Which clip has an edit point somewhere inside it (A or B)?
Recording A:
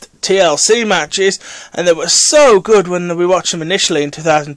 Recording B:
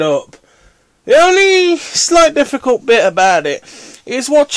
A